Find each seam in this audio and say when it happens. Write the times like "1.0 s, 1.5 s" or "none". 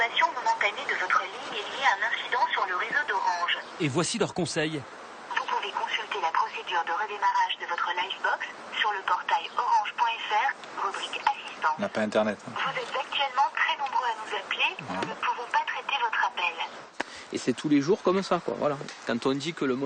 16.8 s

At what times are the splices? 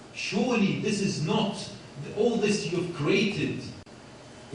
none

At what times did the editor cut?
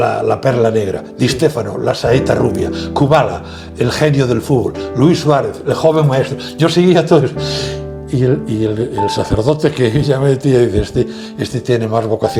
none

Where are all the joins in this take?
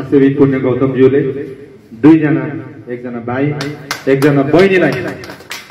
none

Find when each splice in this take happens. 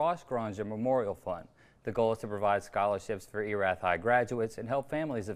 none

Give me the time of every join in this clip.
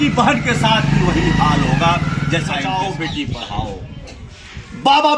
2.7 s

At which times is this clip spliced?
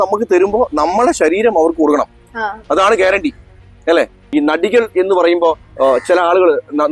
4.2 s

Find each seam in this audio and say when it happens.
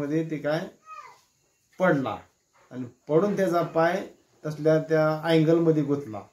none

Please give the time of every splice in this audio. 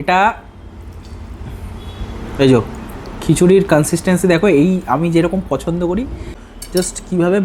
6.3 s

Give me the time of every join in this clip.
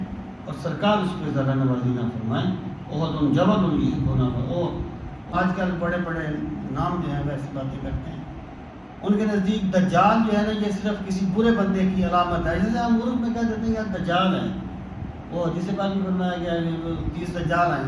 5.3 s

